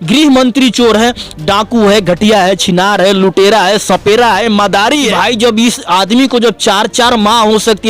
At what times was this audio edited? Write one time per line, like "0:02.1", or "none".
0:05.1